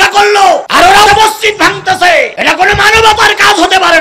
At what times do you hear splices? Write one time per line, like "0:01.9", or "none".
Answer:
0:01.0
0:02.3